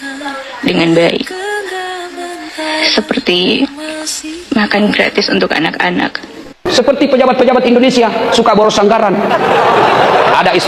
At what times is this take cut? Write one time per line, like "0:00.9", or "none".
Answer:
0:06.6